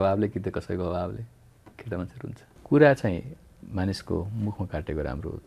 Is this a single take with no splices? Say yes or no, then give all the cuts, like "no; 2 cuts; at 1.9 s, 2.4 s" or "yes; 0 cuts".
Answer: no; 1 cut; at 2.5 s